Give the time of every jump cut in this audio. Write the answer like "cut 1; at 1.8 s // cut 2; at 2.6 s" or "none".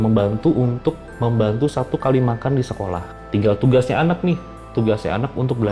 cut 1; at 3.1 s